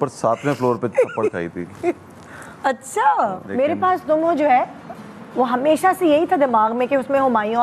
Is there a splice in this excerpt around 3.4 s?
yes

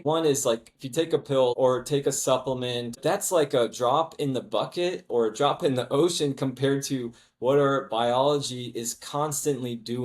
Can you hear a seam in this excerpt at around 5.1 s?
no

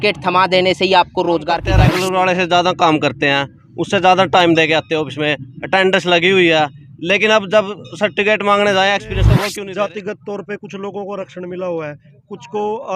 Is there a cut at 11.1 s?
no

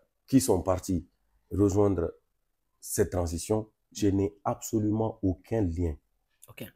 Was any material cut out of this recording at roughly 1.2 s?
no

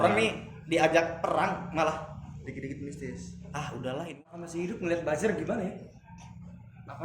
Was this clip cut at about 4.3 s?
yes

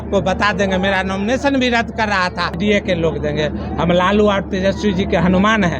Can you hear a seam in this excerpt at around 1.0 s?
no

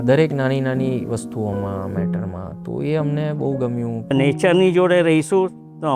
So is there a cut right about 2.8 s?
no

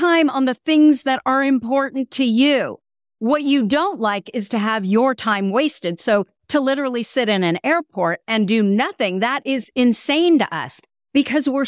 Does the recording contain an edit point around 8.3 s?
no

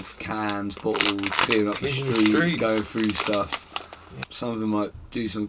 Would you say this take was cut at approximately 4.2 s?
yes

